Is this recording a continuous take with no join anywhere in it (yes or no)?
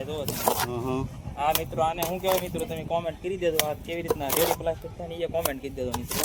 yes